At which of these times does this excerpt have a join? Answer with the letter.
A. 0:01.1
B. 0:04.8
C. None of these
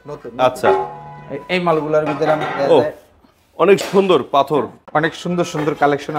B